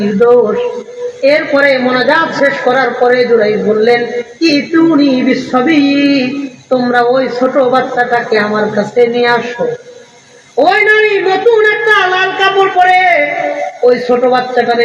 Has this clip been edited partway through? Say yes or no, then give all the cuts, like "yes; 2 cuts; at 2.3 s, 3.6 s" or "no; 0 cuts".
no; 0 cuts